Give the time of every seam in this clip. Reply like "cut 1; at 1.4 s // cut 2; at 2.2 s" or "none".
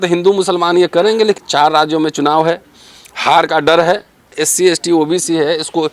cut 1; at 1.4 s // cut 2; at 4.4 s